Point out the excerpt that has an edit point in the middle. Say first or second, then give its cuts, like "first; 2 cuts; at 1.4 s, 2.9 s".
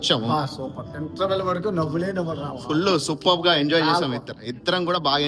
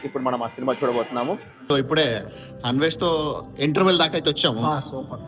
second; 1 cut; at 1.7 s